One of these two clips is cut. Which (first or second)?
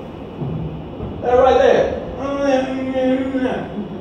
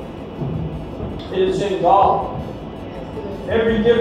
second